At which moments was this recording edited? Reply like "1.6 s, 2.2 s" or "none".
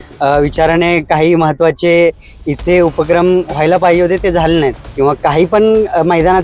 4.8 s